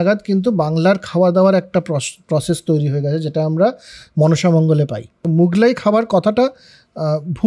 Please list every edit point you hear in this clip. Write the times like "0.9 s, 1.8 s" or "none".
5.1 s